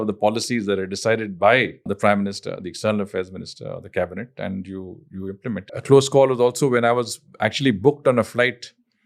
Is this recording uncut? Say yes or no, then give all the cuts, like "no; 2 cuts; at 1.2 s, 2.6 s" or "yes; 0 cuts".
no; 2 cuts; at 1.9 s, 5.7 s